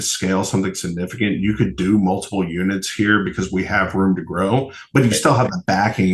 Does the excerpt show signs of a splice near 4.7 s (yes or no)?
no